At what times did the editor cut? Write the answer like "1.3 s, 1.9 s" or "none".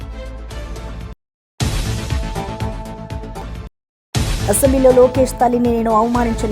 1.1 s